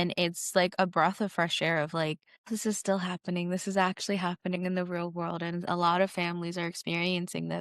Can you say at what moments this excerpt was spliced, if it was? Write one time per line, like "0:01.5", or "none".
0:02.3